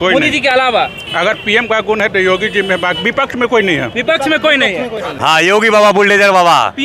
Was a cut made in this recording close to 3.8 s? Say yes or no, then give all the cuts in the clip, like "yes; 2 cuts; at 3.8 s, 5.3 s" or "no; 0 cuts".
no; 1 cut; at 5.1 s